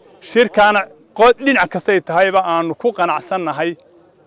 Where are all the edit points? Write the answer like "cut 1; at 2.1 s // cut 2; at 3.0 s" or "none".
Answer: none

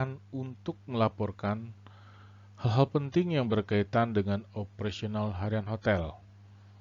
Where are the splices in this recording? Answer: cut 1; at 5.4 s

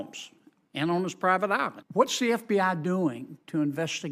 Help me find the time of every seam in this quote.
cut 1; at 1.8 s

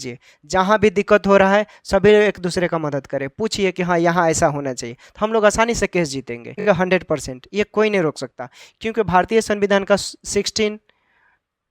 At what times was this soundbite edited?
cut 1; at 6.6 s

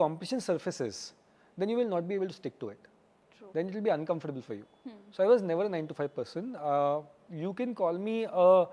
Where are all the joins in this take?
none

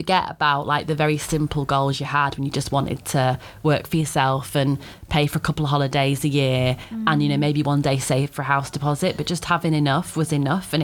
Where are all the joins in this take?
none

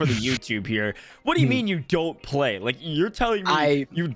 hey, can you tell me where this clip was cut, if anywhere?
none

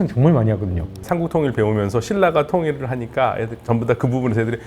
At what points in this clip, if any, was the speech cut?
cut 1; at 1.0 s

